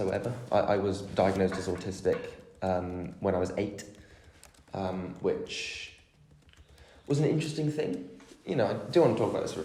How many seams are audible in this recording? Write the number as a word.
zero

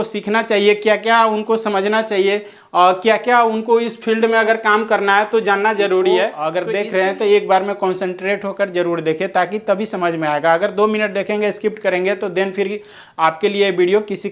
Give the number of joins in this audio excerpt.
one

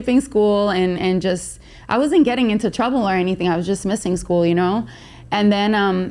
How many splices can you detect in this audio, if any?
zero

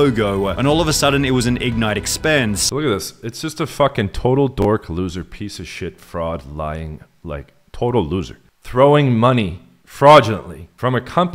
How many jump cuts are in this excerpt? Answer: one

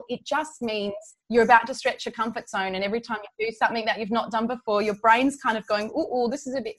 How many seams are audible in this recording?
one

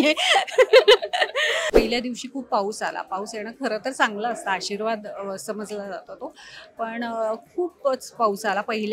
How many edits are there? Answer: one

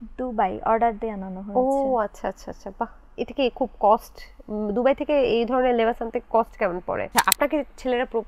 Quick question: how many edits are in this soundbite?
one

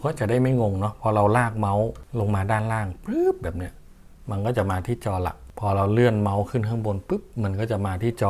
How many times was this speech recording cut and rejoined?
two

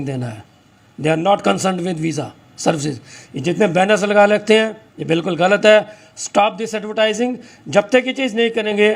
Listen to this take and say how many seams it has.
zero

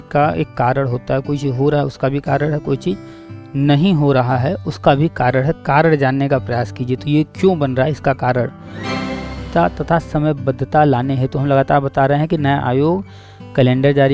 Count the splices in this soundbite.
one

